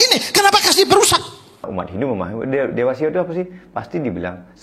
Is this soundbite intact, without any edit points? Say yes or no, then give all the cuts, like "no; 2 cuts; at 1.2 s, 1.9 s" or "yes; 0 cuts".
no; 1 cut; at 1.7 s